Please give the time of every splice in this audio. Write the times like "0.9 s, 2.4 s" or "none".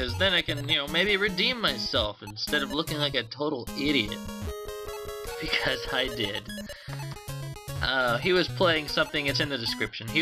none